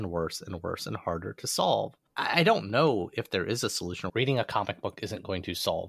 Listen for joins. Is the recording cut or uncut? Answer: cut